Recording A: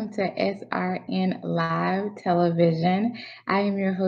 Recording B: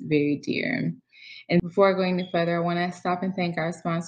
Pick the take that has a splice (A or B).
B